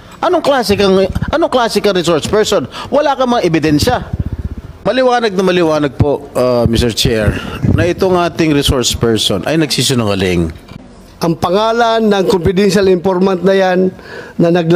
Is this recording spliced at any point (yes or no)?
yes